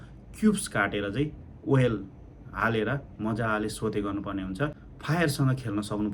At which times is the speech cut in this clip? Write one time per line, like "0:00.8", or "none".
0:04.8